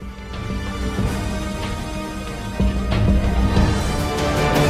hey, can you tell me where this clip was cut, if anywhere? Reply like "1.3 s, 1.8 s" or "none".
none